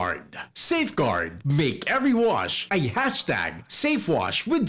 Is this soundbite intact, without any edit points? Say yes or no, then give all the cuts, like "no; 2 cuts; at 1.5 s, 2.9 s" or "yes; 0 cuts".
yes; 0 cuts